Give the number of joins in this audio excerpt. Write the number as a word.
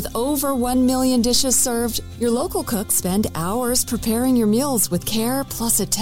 zero